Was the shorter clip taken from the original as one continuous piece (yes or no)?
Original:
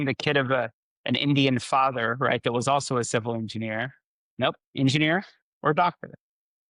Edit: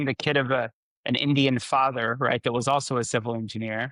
yes